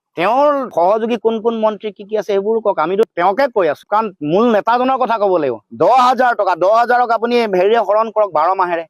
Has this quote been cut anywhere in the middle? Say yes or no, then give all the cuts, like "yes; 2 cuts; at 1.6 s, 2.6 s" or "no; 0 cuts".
yes; 1 cut; at 5.6 s